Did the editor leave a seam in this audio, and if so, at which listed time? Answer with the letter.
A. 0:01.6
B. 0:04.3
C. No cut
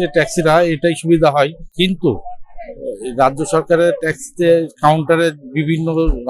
A